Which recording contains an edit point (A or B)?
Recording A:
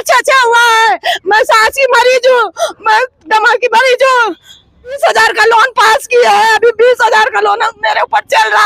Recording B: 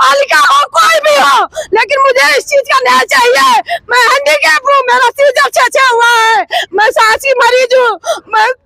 A